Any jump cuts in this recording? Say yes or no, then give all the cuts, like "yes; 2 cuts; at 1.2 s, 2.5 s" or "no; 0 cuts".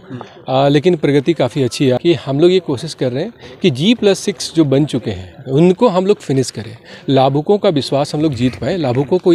yes; 1 cut; at 2.0 s